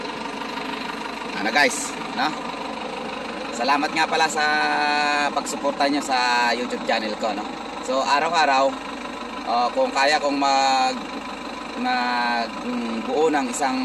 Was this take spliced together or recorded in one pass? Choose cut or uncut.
uncut